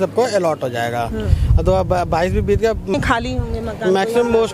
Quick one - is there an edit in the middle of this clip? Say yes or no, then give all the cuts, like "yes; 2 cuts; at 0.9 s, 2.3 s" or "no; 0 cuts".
yes; 1 cut; at 2.9 s